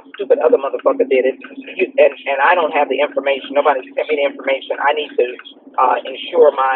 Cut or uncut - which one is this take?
uncut